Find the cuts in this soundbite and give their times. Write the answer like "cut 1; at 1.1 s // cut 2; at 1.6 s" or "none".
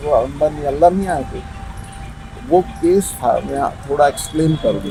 none